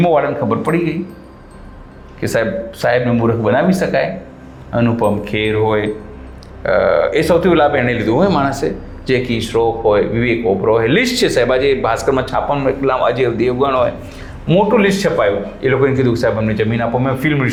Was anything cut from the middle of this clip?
no; 0 cuts

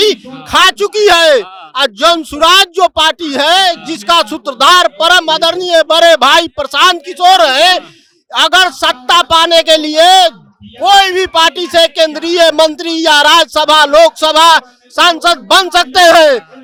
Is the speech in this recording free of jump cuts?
yes; 0 cuts

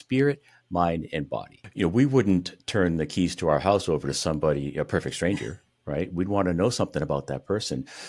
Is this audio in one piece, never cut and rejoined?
no; 1 cut; at 1.6 s

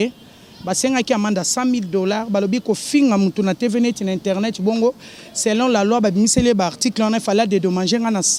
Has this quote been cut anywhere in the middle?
no; 0 cuts

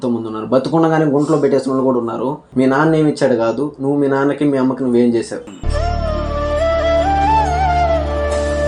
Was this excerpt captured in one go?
no; 1 cut; at 2.4 s

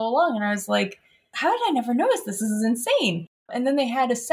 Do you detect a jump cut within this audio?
yes; 1 cut; at 1.3 s

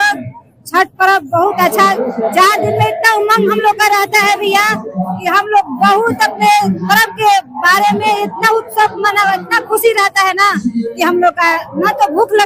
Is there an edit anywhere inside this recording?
no; 0 cuts

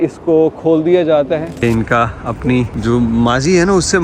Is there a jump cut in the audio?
yes; 2 cuts; at 1.5 s, 2.7 s

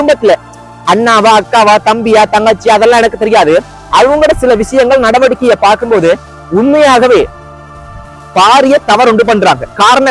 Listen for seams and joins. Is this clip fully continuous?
yes; 0 cuts

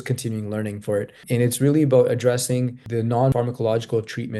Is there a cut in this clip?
yes; 2 cuts; at 1.2 s, 3.1 s

